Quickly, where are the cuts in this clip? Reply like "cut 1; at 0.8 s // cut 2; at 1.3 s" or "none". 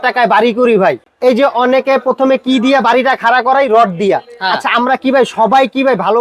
cut 1; at 1.1 s